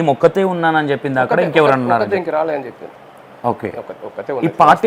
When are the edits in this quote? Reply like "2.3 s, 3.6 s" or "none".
none